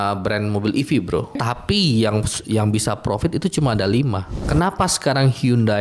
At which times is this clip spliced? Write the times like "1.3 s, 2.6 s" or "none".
1.4 s, 4.4 s